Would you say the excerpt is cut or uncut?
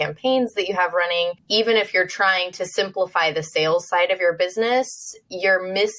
cut